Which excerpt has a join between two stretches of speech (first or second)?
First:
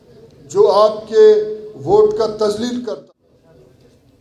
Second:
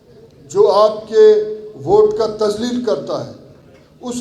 first